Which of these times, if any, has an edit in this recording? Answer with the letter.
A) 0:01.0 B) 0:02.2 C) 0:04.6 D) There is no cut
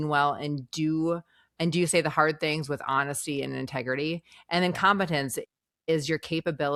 D